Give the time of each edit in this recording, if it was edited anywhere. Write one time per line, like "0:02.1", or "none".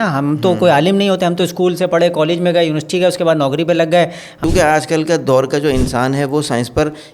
0:04.4